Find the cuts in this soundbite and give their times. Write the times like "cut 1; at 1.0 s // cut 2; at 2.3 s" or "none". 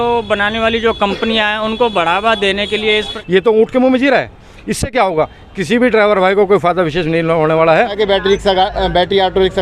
cut 1; at 3.1 s // cut 2; at 7.9 s